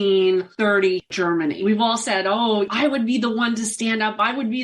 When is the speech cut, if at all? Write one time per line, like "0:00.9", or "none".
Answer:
0:01.3